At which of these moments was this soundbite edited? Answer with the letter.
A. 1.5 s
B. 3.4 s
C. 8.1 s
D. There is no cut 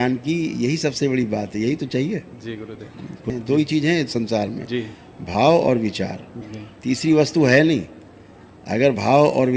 B